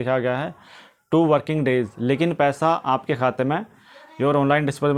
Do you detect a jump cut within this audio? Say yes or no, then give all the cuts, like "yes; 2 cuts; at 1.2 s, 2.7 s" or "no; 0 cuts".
no; 0 cuts